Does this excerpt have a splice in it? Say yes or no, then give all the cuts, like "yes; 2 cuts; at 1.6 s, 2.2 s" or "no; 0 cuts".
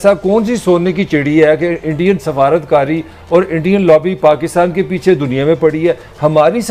no; 0 cuts